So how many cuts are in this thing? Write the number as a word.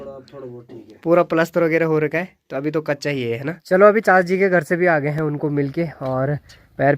one